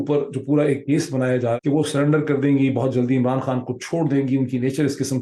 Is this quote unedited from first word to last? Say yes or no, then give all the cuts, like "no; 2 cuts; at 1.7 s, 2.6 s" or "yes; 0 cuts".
no; 1 cut; at 1.6 s